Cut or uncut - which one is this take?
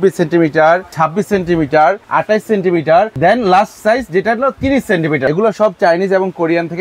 cut